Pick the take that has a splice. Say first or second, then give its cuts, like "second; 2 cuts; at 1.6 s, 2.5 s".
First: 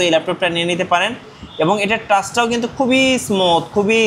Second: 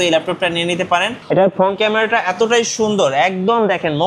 second; 1 cut; at 1.1 s